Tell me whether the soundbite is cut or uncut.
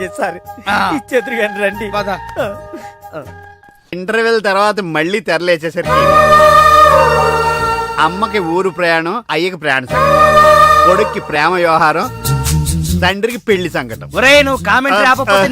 cut